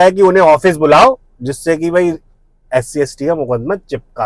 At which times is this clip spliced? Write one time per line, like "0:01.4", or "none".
none